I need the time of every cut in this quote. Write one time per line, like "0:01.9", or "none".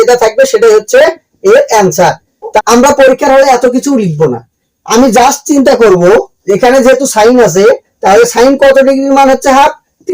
0:02.6